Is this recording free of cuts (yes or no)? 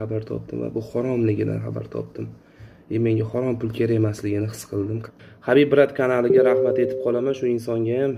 no